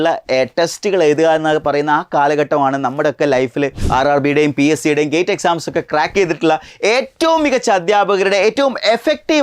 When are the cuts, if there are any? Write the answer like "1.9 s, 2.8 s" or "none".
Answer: 3.8 s